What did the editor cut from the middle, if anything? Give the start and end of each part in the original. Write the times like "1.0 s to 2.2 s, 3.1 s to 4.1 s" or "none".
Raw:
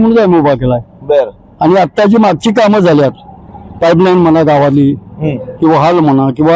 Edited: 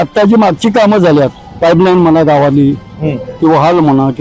3.3 s to 3.6 s